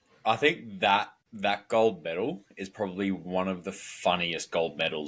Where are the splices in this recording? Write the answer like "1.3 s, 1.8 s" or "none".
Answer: 1.2 s